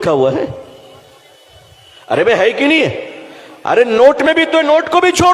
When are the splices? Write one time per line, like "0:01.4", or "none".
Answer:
none